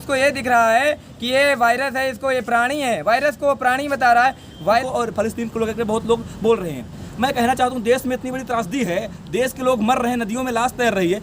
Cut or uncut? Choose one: cut